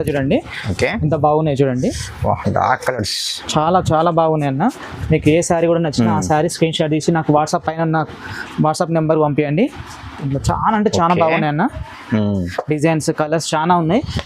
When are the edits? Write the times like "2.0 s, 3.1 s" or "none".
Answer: none